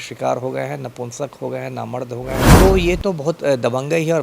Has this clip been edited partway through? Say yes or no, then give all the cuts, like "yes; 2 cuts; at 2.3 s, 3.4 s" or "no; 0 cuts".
yes; 1 cut; at 2.6 s